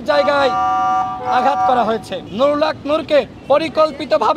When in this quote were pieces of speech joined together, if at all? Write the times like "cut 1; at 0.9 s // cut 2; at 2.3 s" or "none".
cut 1; at 2.3 s